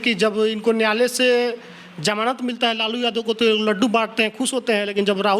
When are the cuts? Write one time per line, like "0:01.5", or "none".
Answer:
none